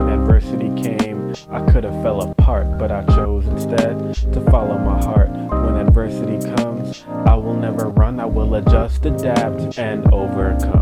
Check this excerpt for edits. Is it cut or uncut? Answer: uncut